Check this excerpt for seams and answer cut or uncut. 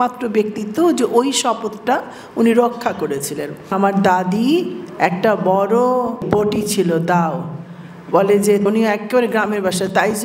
cut